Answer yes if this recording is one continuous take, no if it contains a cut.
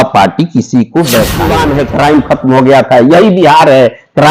no